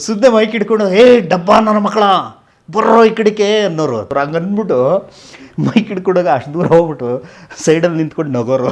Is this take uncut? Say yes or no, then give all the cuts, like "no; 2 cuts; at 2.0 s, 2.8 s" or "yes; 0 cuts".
no; 1 cut; at 4.1 s